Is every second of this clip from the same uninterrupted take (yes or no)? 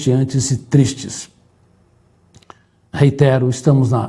yes